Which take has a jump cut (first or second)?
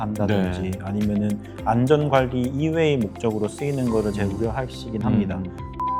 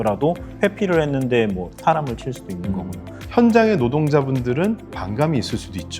second